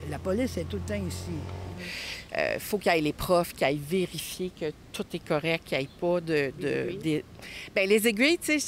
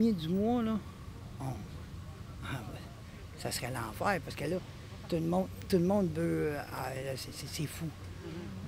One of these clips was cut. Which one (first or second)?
first